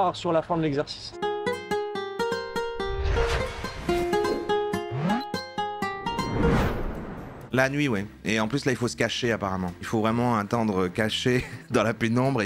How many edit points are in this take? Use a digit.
2